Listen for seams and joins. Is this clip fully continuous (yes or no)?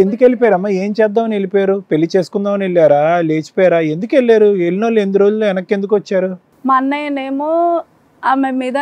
yes